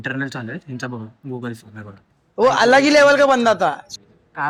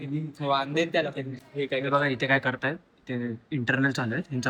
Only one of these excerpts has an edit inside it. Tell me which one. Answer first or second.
second